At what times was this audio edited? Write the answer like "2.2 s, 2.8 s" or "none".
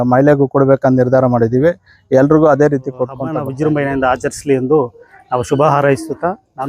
3.5 s

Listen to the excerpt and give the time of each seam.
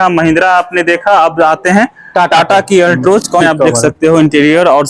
3.4 s

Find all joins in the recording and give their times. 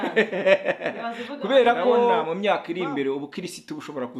2.2 s

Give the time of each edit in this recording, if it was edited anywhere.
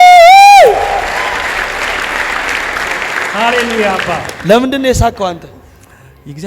4.3 s

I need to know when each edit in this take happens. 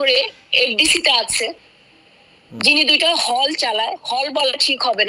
none

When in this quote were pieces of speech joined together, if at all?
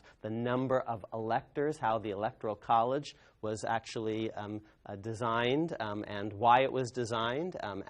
1.2 s

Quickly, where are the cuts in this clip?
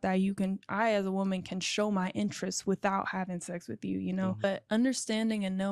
4.4 s

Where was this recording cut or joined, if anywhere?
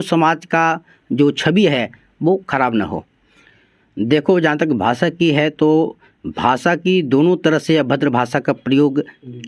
3.4 s

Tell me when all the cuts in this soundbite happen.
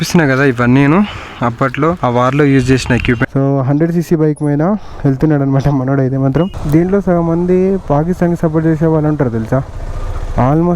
3.2 s, 6.5 s

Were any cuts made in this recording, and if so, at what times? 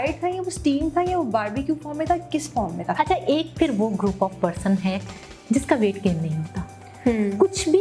3.0 s

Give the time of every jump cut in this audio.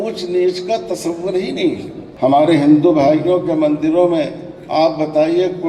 2.0 s

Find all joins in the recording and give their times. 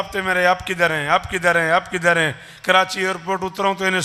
none

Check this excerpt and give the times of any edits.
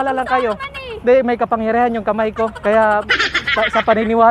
2.6 s

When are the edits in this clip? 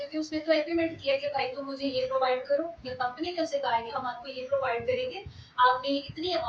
none

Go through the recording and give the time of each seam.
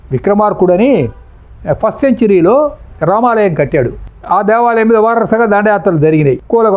none

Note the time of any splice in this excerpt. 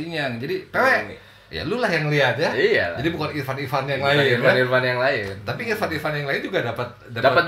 none

